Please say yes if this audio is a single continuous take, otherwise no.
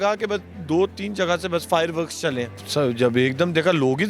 no